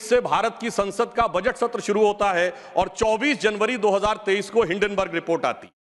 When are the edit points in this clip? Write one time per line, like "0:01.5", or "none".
none